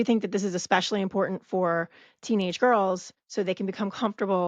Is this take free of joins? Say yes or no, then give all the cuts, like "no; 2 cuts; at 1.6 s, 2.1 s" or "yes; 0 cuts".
no; 1 cut; at 3.2 s